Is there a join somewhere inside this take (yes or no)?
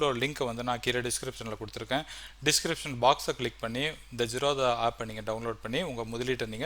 no